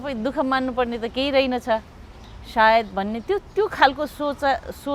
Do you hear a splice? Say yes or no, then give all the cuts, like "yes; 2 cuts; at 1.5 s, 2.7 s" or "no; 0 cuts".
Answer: no; 0 cuts